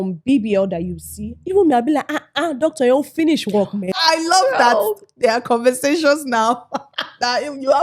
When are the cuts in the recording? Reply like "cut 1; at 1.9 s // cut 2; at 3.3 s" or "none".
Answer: cut 1; at 3.9 s

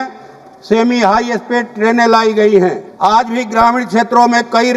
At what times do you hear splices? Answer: cut 1; at 2.9 s

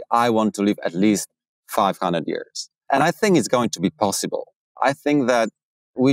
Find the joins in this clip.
cut 1; at 2.8 s // cut 2; at 4.6 s

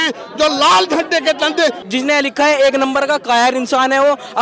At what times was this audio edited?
cut 1; at 1.8 s

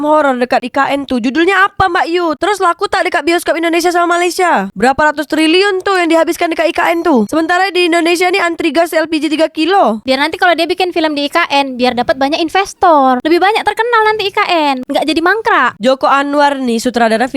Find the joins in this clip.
cut 1; at 4.7 s // cut 2; at 10.0 s

